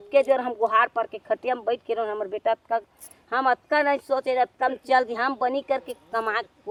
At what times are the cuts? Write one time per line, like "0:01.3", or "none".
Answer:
none